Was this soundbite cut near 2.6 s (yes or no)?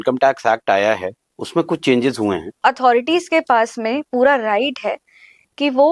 yes